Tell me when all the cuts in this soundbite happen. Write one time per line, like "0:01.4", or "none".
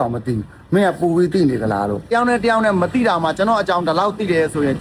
0:02.1